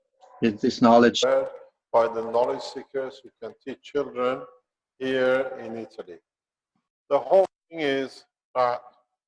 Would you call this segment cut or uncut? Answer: uncut